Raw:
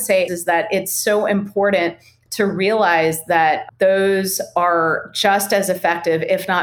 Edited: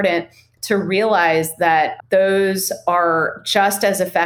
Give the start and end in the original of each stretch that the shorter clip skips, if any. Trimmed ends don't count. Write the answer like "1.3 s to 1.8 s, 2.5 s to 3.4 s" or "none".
none